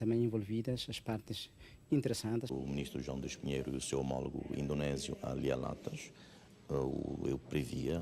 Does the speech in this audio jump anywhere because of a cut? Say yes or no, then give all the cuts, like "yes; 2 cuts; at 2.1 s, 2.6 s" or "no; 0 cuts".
yes; 1 cut; at 2.5 s